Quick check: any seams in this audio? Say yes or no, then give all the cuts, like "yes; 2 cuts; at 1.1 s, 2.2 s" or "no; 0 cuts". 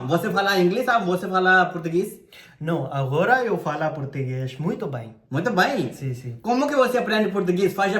no; 0 cuts